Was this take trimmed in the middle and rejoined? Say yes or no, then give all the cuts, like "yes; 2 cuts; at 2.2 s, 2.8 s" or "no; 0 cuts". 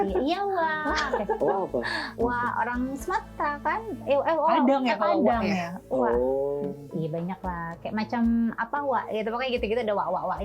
no; 0 cuts